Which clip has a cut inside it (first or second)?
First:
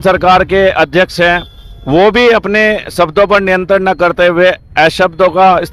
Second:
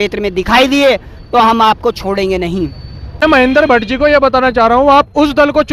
second